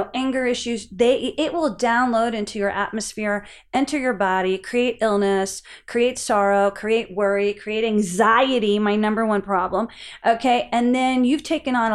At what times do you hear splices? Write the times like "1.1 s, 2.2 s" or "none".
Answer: none